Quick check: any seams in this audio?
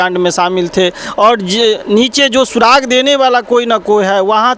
no; 0 cuts

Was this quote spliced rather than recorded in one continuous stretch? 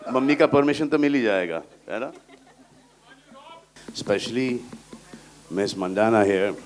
yes; 1 cut; at 3.7 s

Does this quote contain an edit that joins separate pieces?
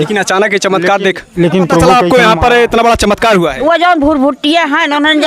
yes; 1 cut; at 1.8 s

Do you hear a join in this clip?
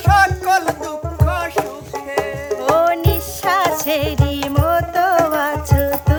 no; 0 cuts

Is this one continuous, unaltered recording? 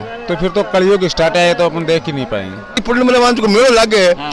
no; 1 cut; at 2.8 s

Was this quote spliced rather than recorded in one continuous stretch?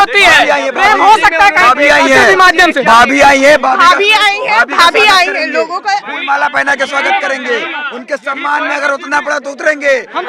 no; 0 cuts

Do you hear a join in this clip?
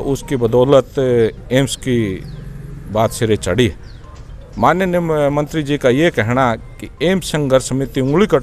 no; 0 cuts

